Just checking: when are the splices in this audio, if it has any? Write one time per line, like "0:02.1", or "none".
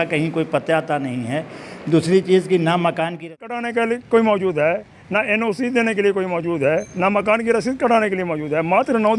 0:03.3